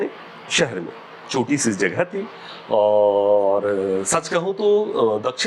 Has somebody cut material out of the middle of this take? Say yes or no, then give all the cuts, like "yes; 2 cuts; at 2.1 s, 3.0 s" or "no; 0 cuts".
no; 0 cuts